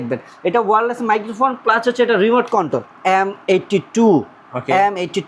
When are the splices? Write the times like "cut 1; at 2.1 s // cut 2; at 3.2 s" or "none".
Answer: cut 1; at 2.9 s